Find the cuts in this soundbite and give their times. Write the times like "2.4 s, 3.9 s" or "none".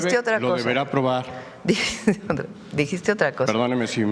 none

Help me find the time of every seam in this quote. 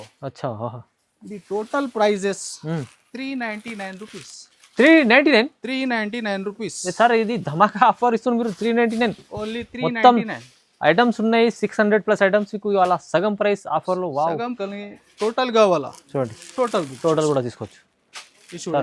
14.6 s

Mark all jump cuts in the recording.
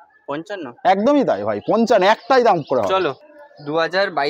3.3 s

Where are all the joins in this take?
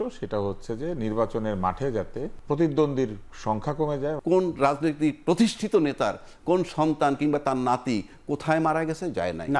2.3 s, 4.2 s

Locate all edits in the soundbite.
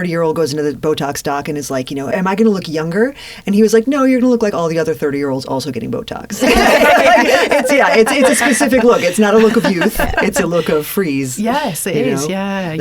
2.1 s

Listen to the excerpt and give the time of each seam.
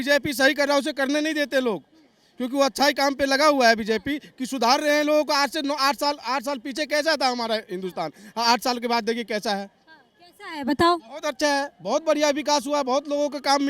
none

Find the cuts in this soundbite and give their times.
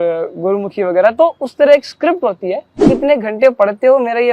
2.9 s

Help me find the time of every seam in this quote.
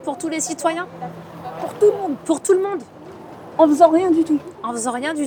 none

